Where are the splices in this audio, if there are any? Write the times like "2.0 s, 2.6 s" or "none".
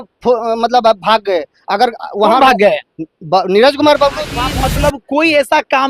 4.4 s